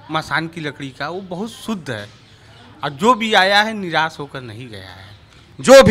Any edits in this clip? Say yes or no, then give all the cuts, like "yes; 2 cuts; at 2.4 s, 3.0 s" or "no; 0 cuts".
no; 0 cuts